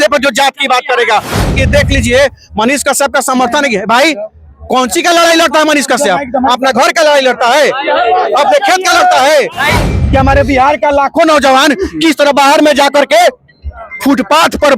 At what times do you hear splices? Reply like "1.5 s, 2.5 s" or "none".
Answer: 1.5 s, 9.9 s